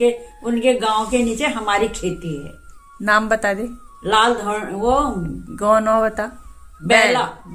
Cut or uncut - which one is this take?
uncut